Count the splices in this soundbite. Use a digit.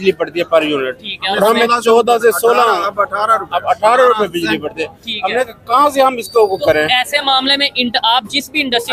0